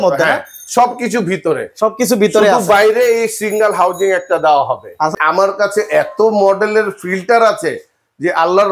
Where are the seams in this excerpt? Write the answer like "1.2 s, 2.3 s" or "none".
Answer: 5.2 s